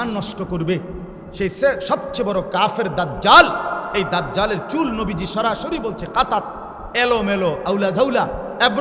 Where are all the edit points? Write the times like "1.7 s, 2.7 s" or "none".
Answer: none